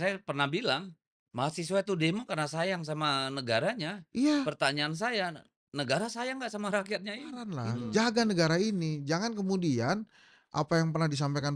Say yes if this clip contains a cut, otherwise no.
yes